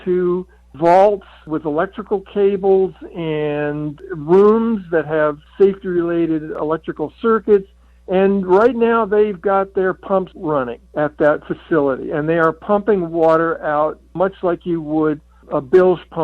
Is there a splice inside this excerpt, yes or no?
yes